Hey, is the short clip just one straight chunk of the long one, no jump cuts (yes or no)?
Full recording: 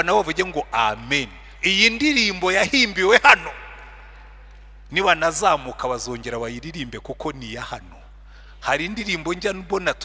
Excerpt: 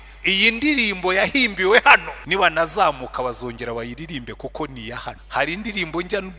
no